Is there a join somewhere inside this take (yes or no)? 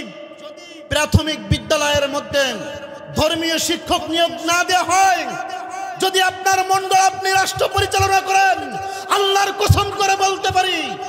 no